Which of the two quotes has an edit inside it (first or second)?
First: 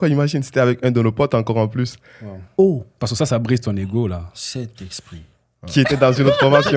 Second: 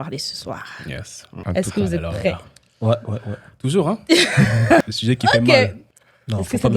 second